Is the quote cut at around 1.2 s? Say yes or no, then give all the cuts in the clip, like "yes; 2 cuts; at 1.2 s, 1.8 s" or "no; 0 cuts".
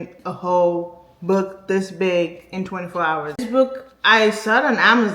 no; 1 cut; at 3.4 s